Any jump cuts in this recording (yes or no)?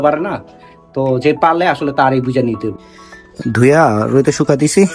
yes